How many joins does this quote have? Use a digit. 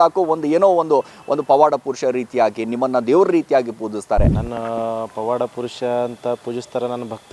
1